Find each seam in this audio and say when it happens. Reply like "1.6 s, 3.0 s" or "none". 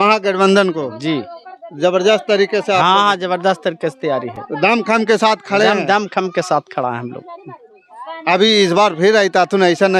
none